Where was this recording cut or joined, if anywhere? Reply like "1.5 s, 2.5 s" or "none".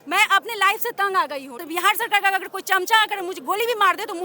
1.6 s